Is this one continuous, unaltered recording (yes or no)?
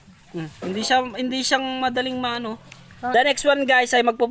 no